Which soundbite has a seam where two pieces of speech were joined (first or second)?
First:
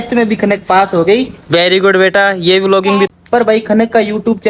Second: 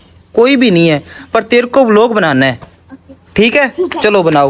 first